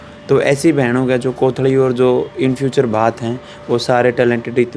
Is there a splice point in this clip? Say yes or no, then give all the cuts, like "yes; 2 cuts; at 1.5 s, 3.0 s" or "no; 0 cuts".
no; 0 cuts